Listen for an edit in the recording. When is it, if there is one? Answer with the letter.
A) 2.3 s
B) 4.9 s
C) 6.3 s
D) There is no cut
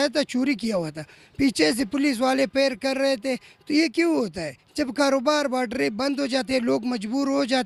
D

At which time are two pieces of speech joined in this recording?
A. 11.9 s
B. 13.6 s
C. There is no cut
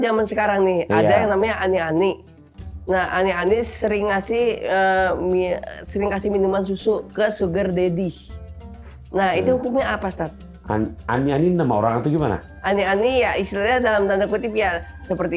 C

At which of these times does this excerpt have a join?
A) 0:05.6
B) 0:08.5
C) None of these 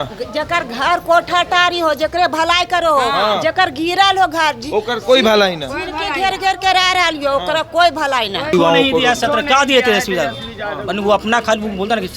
B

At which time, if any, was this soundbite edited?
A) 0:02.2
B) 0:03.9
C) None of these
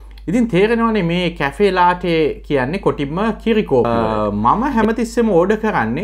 B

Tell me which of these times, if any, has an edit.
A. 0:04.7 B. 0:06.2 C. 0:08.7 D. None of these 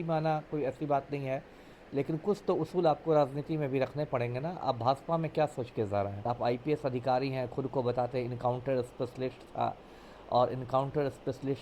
B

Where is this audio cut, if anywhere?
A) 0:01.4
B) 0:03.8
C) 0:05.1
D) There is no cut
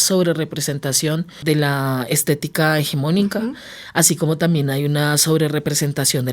A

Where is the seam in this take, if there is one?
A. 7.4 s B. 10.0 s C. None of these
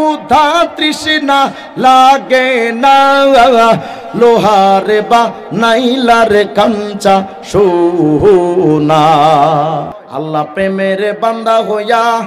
B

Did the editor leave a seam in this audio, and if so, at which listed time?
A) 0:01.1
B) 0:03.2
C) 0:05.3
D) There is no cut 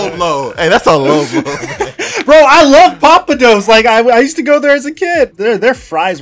C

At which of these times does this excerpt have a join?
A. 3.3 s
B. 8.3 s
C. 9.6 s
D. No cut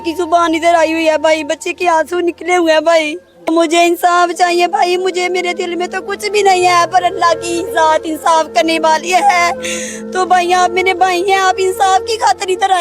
A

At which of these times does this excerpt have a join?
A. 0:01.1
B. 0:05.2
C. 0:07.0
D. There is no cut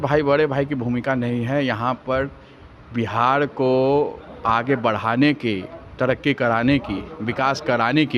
D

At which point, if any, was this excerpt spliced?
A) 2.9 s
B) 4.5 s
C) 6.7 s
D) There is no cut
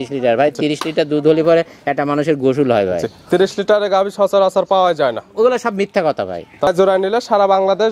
C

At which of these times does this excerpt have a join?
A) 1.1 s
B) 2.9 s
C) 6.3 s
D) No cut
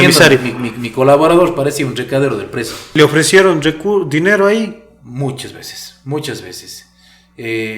B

